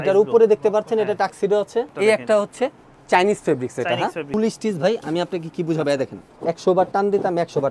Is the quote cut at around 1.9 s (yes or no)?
yes